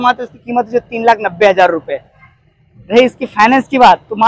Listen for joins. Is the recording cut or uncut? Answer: uncut